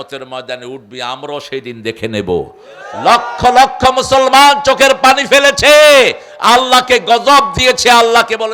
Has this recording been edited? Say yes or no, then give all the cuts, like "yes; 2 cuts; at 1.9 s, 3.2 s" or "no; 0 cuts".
no; 0 cuts